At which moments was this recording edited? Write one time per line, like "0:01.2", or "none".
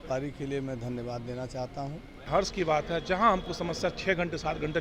0:02.3